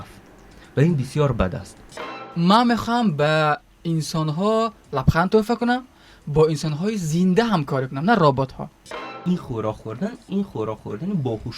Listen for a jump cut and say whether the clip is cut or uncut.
cut